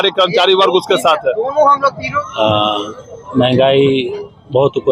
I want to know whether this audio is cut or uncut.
cut